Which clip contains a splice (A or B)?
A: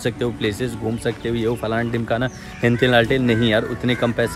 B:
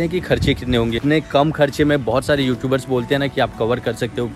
B